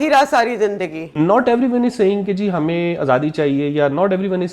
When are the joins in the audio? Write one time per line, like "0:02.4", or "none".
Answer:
0:01.1